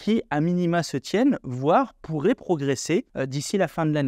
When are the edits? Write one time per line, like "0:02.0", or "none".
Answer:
0:03.1